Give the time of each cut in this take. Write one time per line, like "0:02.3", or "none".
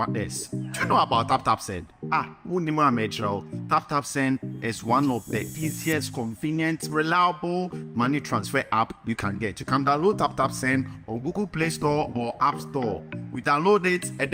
none